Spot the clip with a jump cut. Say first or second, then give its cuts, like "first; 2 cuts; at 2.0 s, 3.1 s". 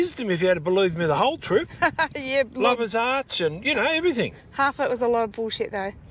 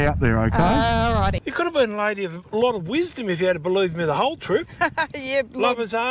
second; 1 cut; at 1.4 s